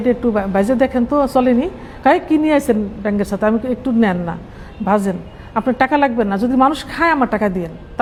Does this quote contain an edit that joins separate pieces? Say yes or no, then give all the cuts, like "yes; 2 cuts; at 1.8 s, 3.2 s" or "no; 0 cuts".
no; 0 cuts